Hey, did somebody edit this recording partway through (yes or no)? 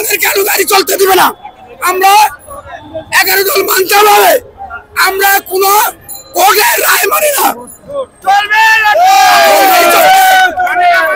no